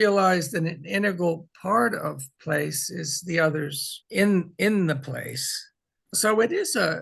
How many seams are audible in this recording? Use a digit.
1